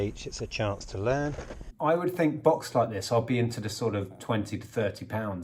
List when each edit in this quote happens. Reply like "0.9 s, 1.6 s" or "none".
1.7 s